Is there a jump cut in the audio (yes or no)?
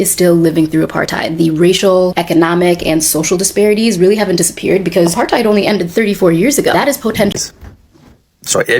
yes